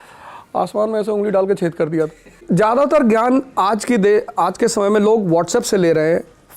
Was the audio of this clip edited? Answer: yes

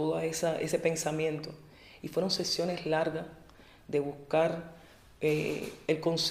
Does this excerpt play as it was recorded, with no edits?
yes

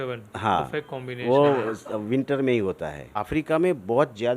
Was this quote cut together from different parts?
yes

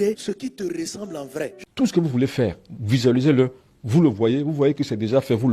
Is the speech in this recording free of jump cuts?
no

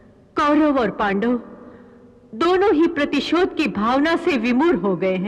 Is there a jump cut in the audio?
no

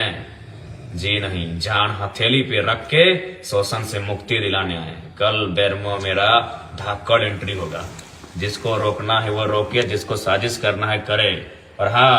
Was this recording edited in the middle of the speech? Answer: no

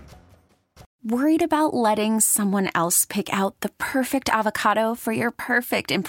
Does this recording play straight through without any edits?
no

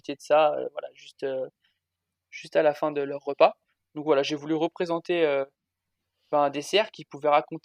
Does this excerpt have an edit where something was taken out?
no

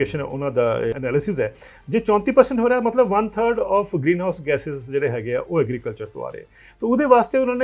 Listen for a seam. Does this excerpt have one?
yes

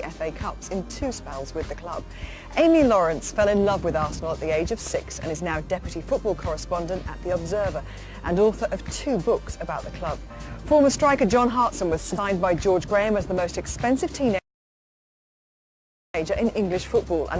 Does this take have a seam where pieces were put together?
yes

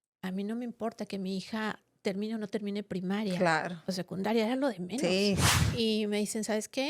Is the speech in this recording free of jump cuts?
no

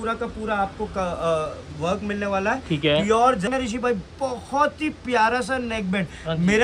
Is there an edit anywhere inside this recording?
yes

